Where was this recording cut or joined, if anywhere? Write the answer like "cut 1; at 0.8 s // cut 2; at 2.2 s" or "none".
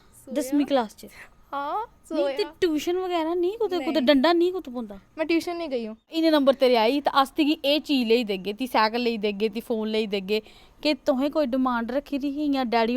cut 1; at 6.1 s